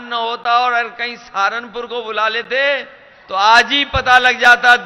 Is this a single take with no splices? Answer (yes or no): yes